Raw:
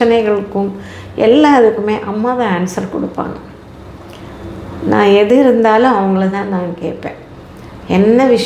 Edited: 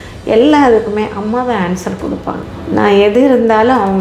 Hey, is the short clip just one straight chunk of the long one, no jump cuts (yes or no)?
no